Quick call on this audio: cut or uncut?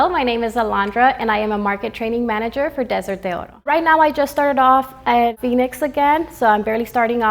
cut